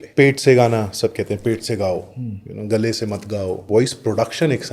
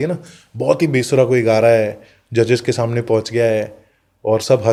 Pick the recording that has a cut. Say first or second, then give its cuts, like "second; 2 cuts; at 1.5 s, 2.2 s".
first; 1 cut; at 3.6 s